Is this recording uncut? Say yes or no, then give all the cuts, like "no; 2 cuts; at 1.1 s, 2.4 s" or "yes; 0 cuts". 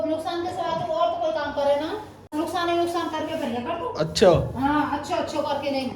no; 1 cut; at 2.3 s